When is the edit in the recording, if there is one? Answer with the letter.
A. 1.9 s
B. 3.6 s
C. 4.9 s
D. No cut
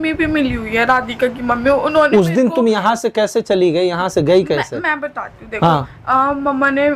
D